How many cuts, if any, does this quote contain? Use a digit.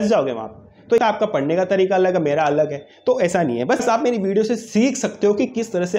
1